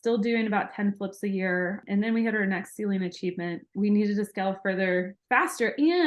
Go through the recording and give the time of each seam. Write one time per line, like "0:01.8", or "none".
0:01.8
0:03.7